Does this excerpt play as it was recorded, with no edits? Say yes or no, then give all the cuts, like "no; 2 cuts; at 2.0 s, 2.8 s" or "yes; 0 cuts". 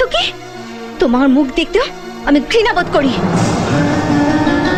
yes; 0 cuts